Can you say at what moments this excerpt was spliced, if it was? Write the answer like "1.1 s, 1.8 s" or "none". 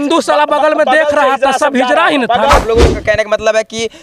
2.6 s